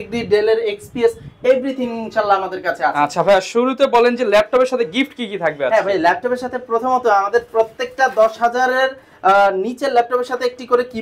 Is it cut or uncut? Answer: uncut